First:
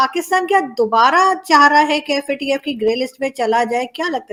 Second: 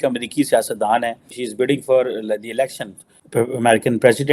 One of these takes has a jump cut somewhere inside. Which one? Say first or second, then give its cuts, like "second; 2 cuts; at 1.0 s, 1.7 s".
second; 1 cut; at 1.4 s